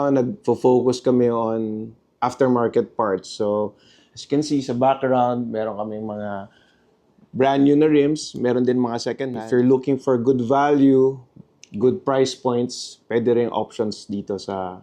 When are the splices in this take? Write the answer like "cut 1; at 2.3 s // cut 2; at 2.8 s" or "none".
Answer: cut 1; at 9.4 s // cut 2; at 11.4 s